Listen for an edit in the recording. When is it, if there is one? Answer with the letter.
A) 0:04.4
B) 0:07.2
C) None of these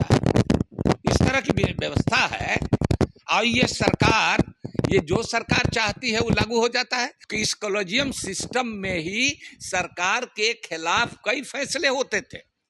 B